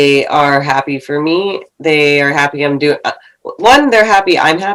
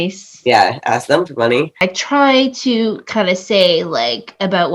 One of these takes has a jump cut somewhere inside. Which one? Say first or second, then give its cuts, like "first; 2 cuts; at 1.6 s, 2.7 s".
second; 1 cut; at 1.8 s